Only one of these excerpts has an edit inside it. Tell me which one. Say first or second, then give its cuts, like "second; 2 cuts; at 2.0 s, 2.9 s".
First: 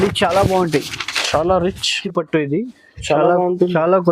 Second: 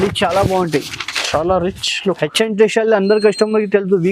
first; 1 cut; at 1.9 s